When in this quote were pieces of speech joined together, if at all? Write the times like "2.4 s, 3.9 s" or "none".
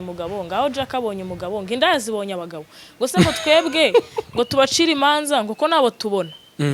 none